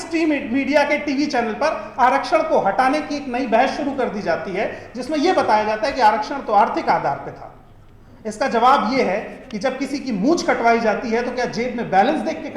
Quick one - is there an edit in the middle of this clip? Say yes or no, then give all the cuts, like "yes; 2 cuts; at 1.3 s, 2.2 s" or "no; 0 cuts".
no; 0 cuts